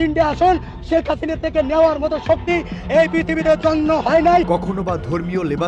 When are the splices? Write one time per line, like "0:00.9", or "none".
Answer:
none